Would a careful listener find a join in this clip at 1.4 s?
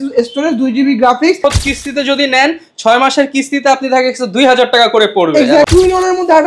yes; 2 cuts; at 1.4 s, 5.7 s

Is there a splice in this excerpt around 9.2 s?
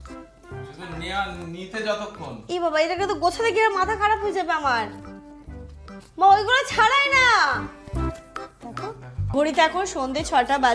yes; 1 cut; at 9.2 s

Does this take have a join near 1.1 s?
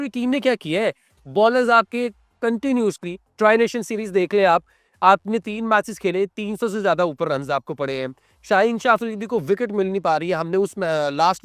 no; 0 cuts

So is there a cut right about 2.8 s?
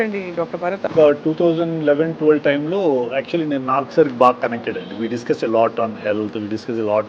no; 1 cut; at 0.9 s

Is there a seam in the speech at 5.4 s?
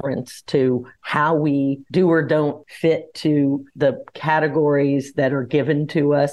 no; 4 cuts; at 1.0 s, 1.8 s, 2.7 s, 3.7 s

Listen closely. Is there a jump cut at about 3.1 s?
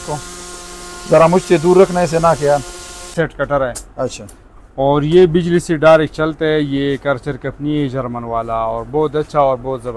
yes; 1 cut; at 3.1 s

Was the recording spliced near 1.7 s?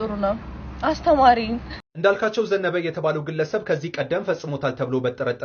yes; 1 cut; at 1.7 s

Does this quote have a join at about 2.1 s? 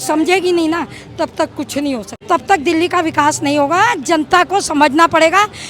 yes; 1 cut; at 2.1 s

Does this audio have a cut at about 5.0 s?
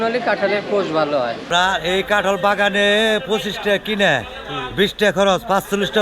no; 1 cut; at 1.4 s

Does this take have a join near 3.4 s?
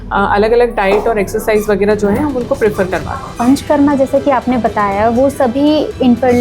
yes; 1 cut; at 3.4 s

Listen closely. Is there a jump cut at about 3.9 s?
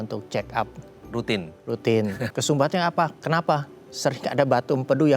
no; 1 cut; at 2.3 s

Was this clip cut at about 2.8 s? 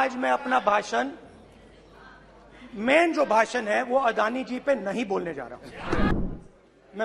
no; 1 cut; at 6.1 s

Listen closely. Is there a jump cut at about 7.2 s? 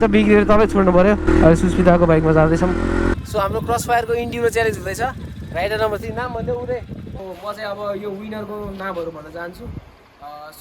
yes; 3 cuts; at 1.3 s, 3.1 s, 7.2 s

